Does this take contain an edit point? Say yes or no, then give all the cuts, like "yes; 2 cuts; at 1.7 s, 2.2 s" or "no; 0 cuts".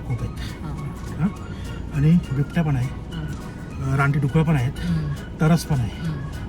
no; 0 cuts